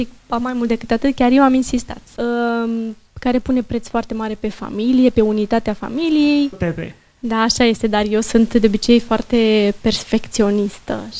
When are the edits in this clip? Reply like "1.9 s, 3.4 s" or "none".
2.1 s, 6.6 s